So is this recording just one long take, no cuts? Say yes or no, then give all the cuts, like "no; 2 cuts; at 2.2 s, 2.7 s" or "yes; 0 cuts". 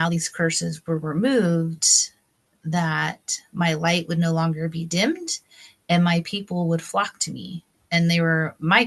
yes; 0 cuts